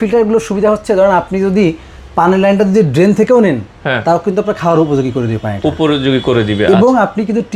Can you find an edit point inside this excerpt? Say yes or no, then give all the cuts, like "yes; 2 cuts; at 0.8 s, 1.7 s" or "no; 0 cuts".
no; 0 cuts